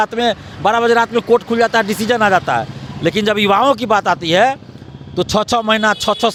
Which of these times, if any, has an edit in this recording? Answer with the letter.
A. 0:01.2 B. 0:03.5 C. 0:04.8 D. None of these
D